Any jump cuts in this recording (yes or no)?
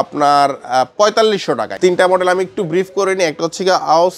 yes